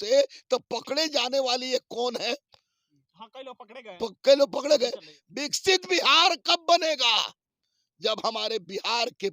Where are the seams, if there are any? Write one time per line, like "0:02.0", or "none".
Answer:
0:05.1